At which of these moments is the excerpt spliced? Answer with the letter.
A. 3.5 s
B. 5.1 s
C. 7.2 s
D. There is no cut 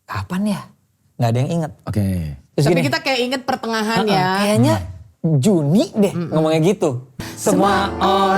C